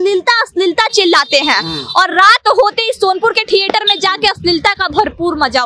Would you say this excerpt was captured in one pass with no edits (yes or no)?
yes